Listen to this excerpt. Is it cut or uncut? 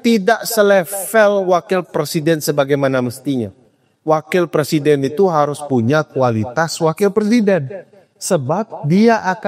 uncut